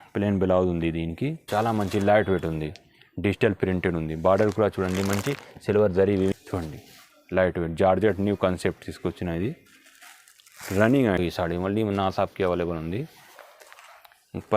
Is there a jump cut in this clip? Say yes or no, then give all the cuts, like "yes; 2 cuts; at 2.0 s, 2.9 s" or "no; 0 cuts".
yes; 3 cuts; at 1.5 s, 6.3 s, 11.2 s